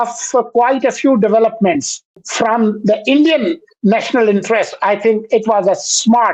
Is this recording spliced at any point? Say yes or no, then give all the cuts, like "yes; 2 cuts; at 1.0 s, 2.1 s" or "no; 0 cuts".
yes; 1 cut; at 2.2 s